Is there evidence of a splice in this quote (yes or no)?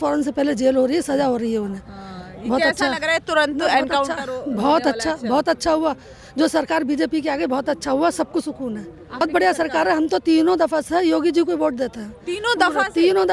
yes